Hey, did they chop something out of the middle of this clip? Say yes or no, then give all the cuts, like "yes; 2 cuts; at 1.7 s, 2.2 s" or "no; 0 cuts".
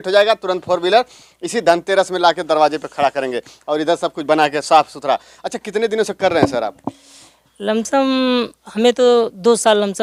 no; 0 cuts